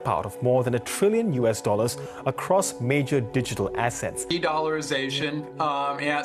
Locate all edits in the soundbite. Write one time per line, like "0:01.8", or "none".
0:04.2